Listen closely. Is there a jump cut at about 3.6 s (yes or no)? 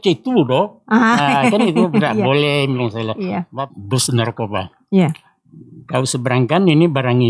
yes